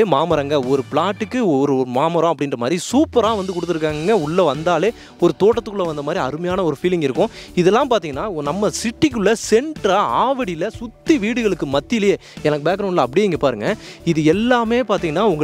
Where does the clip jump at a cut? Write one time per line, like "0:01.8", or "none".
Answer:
none